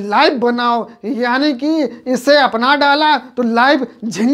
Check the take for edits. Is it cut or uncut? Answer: uncut